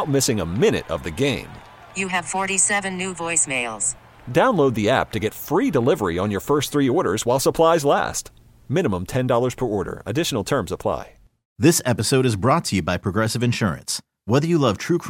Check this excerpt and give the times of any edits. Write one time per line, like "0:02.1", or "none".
0:11.4